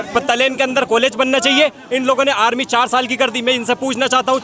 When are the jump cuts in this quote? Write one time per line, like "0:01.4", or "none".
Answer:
none